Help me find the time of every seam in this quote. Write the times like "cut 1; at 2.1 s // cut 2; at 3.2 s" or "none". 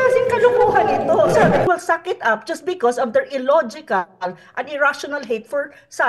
cut 1; at 1.6 s